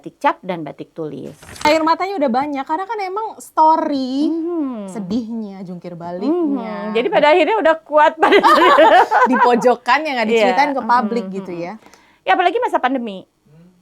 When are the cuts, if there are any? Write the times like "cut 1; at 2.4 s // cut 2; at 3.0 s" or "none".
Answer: cut 1; at 1.6 s